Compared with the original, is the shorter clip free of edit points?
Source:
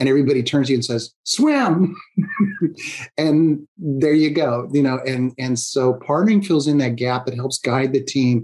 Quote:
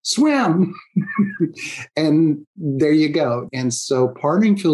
no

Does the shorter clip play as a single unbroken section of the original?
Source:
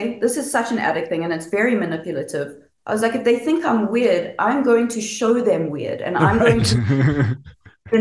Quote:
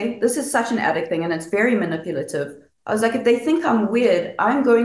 yes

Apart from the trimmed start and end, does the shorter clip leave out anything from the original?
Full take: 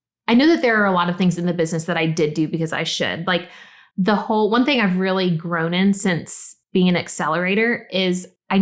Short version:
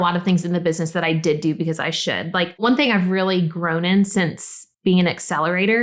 yes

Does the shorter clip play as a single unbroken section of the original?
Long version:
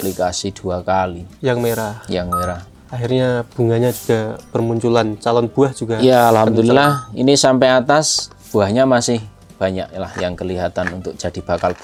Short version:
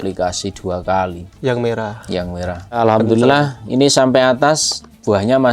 no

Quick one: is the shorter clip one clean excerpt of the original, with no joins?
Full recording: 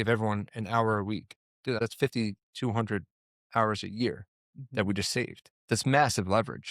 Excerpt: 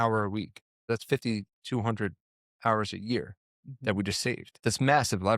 no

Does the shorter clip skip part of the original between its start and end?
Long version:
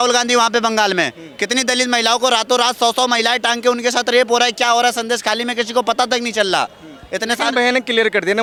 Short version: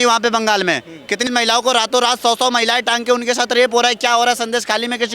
yes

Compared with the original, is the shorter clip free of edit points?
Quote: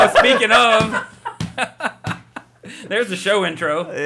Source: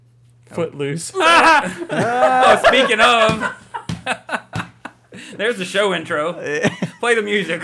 yes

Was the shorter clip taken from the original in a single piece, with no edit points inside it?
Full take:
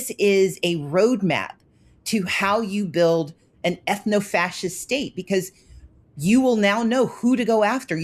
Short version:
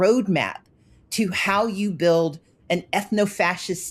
yes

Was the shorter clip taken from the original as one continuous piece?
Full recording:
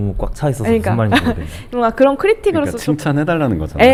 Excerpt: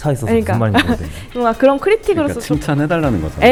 yes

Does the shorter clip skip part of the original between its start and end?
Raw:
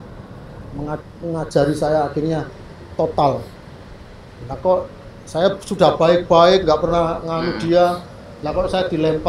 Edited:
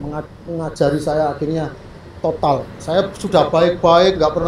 yes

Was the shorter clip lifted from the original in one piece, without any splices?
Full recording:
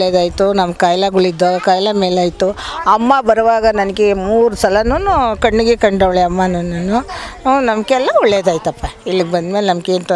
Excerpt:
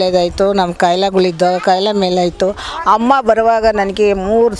yes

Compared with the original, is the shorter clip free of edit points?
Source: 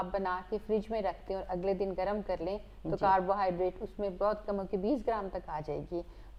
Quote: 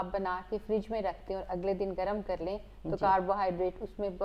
yes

